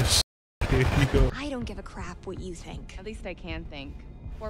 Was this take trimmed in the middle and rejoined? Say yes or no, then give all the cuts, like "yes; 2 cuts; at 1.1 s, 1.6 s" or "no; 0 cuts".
yes; 1 cut; at 1.3 s